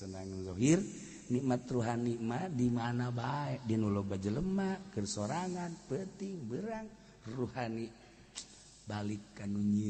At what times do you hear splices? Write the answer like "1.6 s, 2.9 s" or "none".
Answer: none